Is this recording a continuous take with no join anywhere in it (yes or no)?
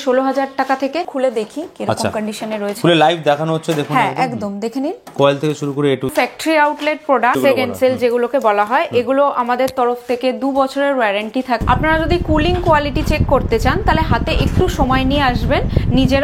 no